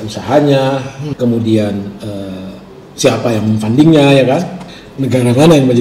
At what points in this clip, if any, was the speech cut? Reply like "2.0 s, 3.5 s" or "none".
1.0 s, 4.6 s